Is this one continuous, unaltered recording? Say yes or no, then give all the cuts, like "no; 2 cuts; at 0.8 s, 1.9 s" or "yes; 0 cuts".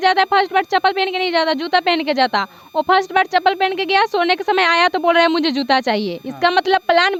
yes; 0 cuts